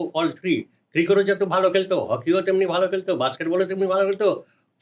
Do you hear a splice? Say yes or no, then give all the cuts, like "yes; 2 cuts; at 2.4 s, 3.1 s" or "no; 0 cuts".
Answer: no; 0 cuts